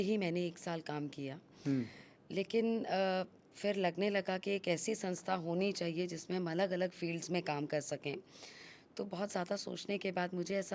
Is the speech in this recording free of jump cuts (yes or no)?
yes